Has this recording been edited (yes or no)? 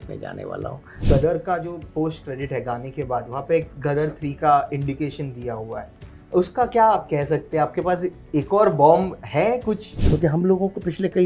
yes